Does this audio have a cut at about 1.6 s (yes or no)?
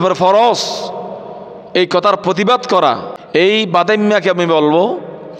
no